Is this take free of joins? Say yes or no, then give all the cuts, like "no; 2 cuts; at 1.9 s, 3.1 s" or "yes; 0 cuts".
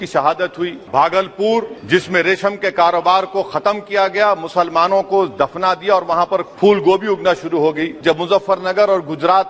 no; 4 cuts; at 0.8 s, 1.8 s, 6.5 s, 7.9 s